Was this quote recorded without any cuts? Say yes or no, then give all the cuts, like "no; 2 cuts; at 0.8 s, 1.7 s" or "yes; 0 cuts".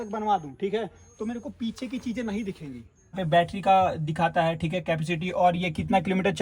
no; 1 cut; at 3.2 s